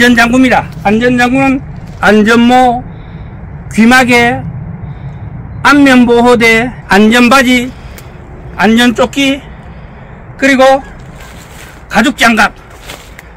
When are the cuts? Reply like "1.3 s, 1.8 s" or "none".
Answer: none